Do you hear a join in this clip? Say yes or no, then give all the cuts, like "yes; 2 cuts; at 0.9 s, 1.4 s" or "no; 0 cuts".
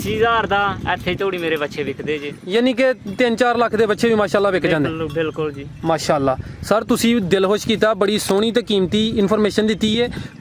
no; 0 cuts